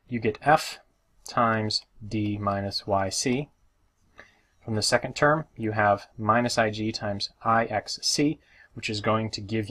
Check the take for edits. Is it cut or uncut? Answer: uncut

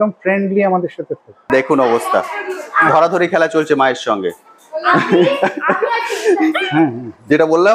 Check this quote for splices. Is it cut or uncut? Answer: cut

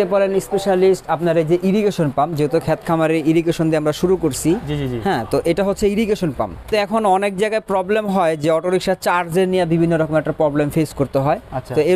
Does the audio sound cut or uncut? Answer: cut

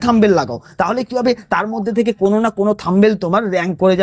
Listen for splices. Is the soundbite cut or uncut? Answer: uncut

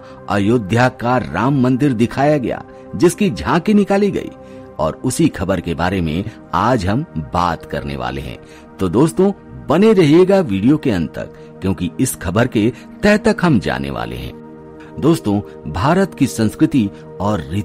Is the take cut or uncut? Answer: cut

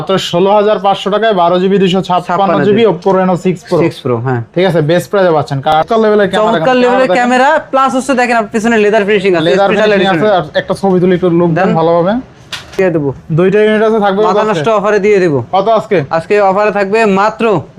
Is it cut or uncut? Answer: cut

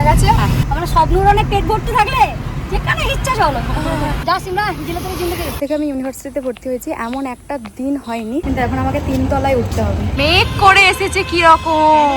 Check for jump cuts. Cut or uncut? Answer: cut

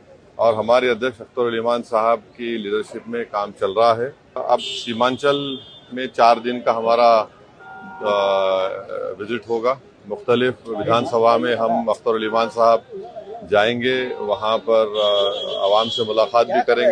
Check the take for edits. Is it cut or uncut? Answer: cut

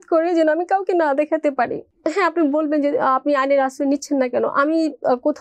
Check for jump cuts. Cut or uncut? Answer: cut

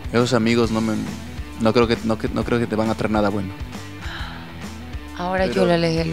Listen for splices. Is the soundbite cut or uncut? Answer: uncut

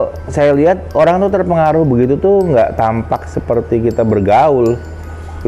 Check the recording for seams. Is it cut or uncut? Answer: uncut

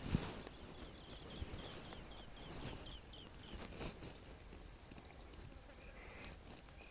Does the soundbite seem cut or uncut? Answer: uncut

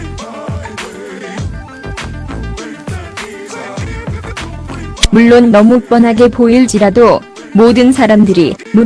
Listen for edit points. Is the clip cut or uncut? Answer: uncut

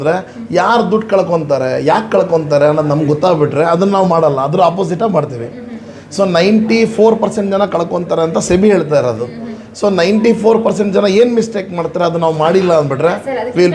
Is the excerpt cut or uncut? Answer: uncut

